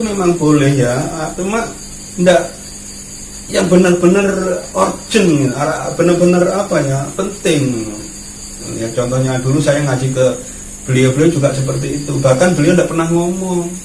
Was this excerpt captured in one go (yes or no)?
no